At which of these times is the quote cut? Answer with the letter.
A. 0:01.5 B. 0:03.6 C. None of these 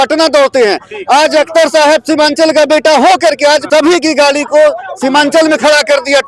B